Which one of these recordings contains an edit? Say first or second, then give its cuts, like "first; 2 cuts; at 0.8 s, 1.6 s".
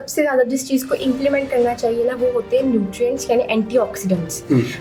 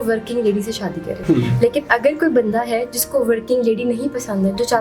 second; 1 cut; at 1.1 s